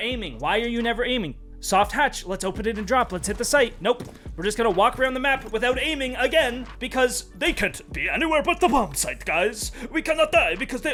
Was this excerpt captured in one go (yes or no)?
yes